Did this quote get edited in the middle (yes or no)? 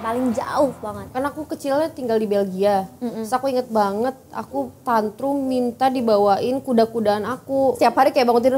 yes